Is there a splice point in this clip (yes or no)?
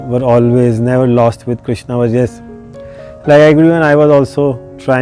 no